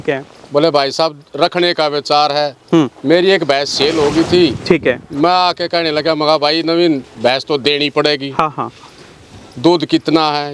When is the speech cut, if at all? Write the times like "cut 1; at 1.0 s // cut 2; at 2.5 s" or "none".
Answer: none